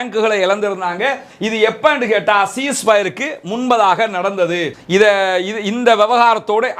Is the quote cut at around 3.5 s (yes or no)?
no